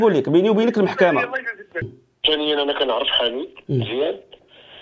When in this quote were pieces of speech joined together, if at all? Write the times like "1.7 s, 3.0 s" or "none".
2.0 s